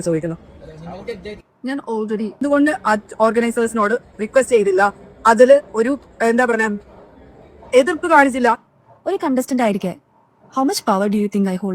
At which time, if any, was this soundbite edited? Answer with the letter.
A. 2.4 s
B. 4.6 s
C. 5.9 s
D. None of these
A